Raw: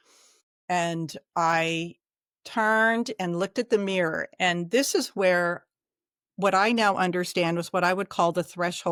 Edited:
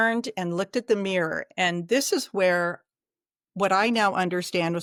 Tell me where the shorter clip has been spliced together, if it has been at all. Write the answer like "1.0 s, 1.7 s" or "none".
none